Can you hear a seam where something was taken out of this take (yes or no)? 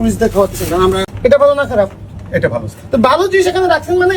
yes